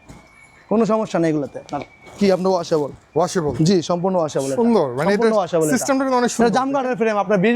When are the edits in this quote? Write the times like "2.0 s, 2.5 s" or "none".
none